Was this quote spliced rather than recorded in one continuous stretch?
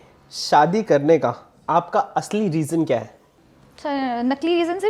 no; 0 cuts

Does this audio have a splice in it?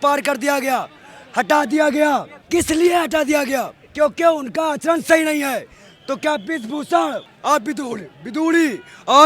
yes; 3 cuts; at 2.3 s, 3.8 s, 7.3 s

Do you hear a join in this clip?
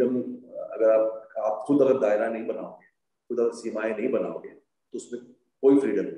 no; 0 cuts

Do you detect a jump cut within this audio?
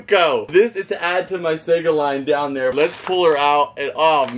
yes; 1 cut; at 2.7 s

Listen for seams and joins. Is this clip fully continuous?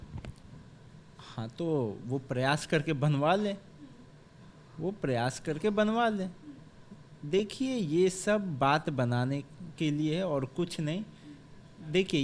yes; 0 cuts

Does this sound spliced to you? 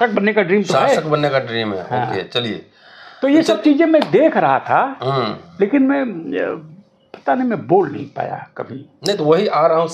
no; 0 cuts

